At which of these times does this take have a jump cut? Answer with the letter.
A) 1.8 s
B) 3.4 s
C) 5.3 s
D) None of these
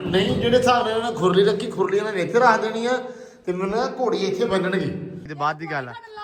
C